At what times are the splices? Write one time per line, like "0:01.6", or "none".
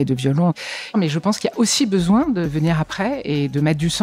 0:00.9
0:02.5